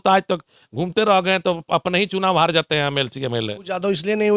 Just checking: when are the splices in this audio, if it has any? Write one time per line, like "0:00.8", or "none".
none